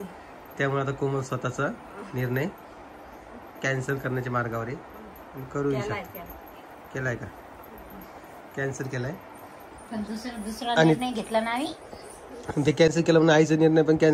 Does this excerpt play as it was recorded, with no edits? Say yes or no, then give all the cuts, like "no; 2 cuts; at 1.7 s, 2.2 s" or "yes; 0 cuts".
yes; 0 cuts